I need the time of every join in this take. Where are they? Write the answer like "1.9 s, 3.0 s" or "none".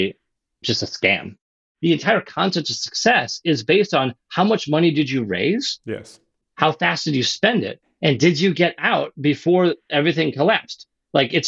1.5 s